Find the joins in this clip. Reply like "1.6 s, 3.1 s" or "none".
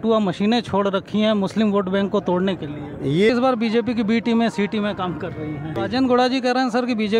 3.3 s, 5.8 s